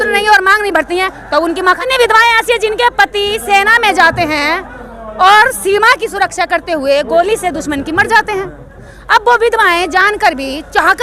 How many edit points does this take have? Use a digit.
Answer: 1